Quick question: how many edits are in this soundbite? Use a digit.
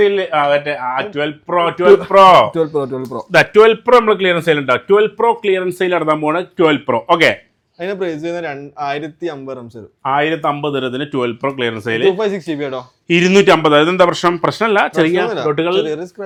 0